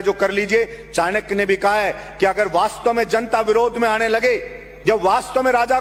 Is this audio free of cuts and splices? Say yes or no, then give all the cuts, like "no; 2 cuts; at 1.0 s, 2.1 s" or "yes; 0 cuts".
yes; 0 cuts